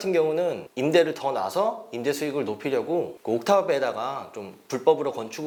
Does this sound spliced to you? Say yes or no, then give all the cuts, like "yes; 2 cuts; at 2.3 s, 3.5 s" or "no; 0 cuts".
no; 0 cuts